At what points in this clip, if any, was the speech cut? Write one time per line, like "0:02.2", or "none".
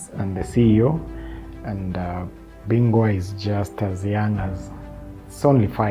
0:02.5
0:03.3